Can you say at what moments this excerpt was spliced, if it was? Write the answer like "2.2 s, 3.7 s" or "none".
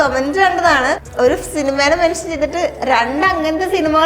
1.1 s